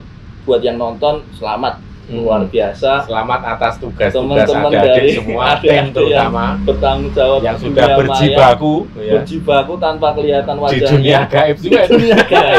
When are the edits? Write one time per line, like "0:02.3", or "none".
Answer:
none